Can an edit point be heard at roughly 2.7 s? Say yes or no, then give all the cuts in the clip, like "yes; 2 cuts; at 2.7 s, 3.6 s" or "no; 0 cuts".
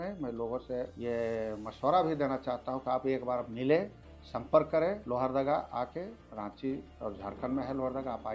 no; 4 cuts; at 0.9 s, 5.0 s, 6.2 s, 6.9 s